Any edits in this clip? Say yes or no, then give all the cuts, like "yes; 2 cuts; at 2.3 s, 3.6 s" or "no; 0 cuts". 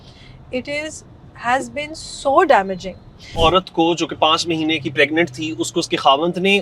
yes; 1 cut; at 3.3 s